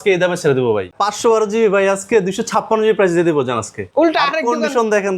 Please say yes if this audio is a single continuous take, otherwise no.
no